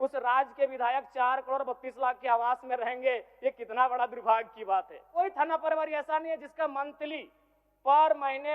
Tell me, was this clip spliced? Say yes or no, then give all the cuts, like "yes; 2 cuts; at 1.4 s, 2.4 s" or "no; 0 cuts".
yes; 1 cut; at 5.1 s